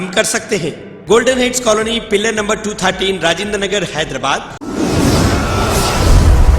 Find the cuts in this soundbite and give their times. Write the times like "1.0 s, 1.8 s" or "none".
0.9 s, 4.6 s